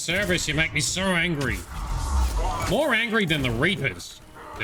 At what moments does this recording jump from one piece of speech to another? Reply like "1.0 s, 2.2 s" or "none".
none